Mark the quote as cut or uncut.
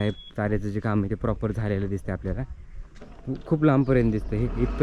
uncut